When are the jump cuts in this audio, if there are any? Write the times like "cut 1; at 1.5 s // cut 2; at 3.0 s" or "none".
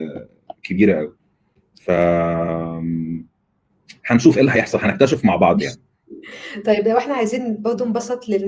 none